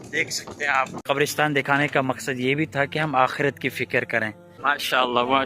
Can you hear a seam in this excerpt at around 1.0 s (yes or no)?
yes